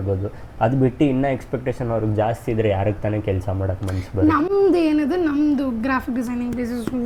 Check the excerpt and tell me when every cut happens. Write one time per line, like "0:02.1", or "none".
none